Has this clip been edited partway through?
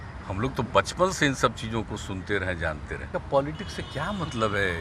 yes; 1 cut; at 3.0 s

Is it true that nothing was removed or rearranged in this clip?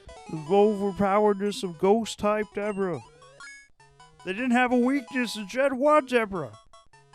yes; 0 cuts

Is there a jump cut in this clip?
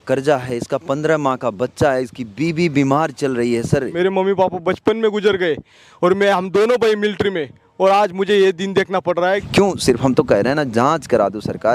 yes; 2 cuts; at 3.9 s, 9.5 s

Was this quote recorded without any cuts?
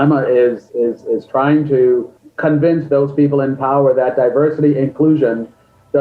no; 1 cut; at 2.2 s

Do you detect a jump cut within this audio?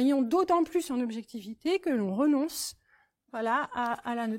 no; 0 cuts

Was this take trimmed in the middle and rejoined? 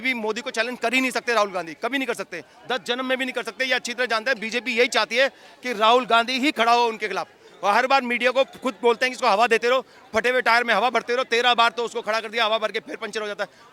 no; 0 cuts

